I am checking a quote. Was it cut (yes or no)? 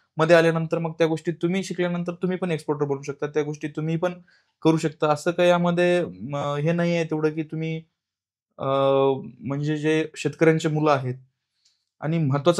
no